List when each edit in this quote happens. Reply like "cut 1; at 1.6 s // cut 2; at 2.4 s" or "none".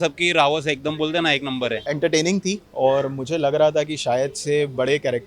cut 1; at 1.8 s